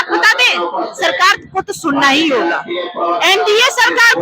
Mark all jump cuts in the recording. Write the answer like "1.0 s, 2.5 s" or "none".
none